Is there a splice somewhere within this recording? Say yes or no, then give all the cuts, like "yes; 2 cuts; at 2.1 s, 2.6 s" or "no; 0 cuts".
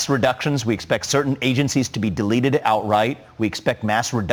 no; 0 cuts